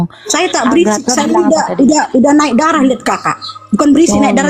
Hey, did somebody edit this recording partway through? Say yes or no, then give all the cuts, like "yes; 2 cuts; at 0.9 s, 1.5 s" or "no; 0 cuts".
no; 0 cuts